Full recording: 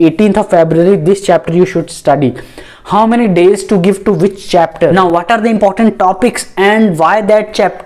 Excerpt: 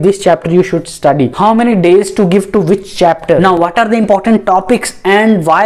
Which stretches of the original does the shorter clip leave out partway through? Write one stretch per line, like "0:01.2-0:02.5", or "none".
0:02.4-0:02.9

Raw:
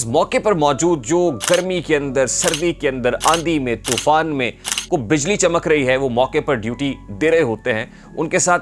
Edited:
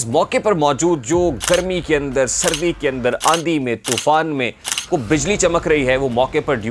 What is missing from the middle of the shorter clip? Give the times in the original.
none

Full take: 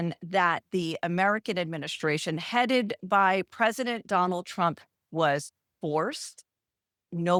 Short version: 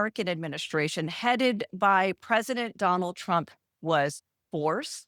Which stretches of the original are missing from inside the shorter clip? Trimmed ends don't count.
none

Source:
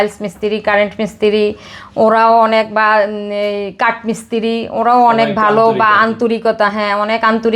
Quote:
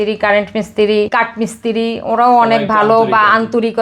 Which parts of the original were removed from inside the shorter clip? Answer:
0:01.5-0:03.8

